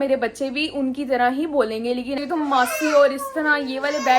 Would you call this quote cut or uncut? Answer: cut